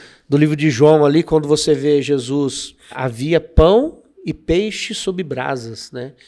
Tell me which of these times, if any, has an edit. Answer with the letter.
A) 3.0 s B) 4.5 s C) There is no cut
A